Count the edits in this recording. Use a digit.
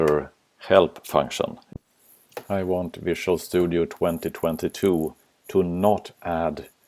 1